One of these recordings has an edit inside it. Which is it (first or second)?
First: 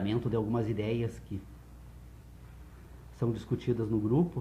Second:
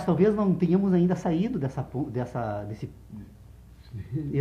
second